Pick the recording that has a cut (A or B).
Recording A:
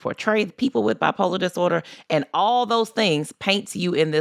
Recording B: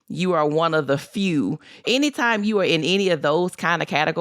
B